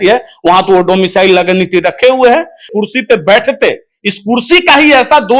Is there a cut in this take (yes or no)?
yes